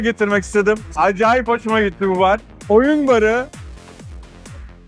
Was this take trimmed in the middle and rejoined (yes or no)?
yes